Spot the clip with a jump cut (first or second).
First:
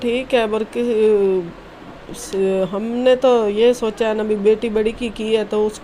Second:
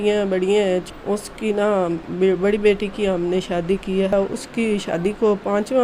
second